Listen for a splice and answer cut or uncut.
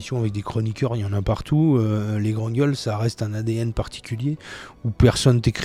uncut